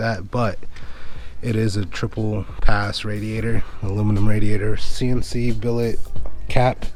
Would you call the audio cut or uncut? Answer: uncut